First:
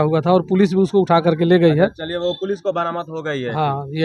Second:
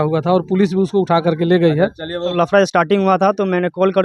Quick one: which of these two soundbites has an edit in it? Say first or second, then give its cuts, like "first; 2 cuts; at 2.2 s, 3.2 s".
second; 1 cut; at 2.3 s